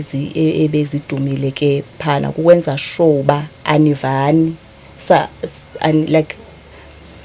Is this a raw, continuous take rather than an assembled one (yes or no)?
yes